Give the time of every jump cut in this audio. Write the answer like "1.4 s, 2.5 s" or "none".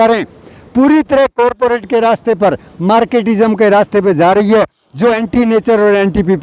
none

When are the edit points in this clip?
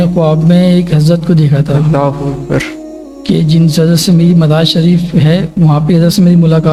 none

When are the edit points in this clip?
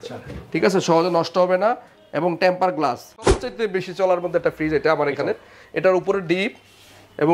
3.3 s

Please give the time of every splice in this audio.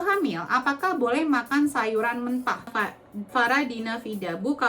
2.7 s

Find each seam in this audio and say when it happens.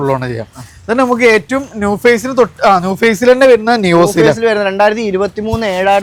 none

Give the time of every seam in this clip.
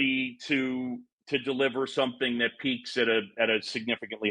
1.1 s

